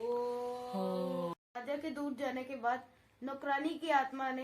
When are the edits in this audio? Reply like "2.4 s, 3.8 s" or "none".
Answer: 1.3 s